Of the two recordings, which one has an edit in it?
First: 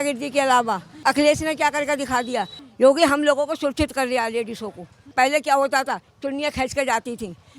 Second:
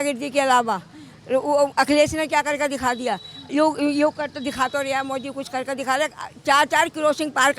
first; 3 cuts; at 1.0 s, 2.6 s, 5.1 s

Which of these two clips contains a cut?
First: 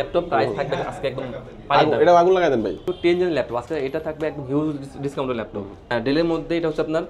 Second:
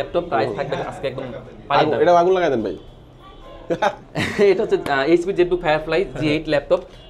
first; 2 cuts; at 2.9 s, 5.9 s

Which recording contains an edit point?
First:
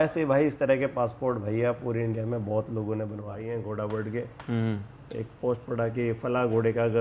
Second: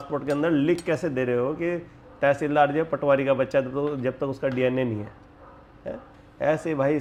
first; 1 cut; at 3.3 s

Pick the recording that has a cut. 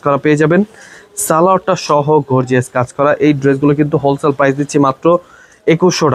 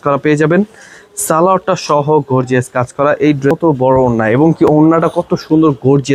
second; 1 cut; at 3.5 s

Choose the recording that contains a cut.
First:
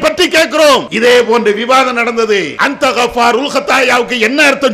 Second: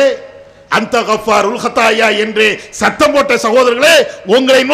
first; 2 cuts; at 0.9 s, 2.5 s

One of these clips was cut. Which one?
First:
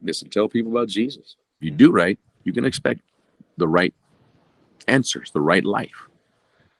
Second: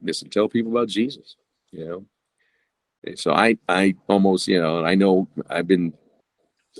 first; 1 cut; at 1.6 s

